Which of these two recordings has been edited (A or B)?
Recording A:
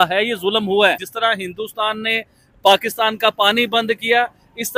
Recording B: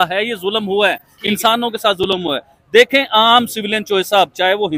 A